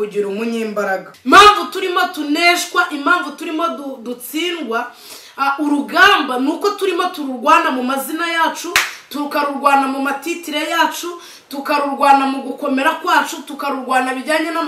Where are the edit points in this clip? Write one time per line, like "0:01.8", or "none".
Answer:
0:01.1